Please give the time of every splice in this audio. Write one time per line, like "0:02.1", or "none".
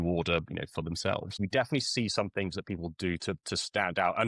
0:01.4